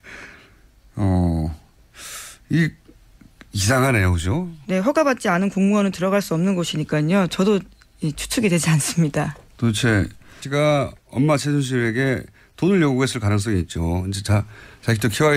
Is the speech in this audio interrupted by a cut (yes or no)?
no